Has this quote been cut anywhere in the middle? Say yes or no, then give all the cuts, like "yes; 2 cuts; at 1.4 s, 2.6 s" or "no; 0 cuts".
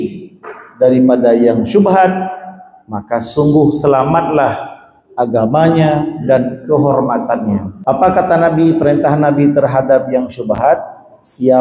yes; 1 cut; at 7.7 s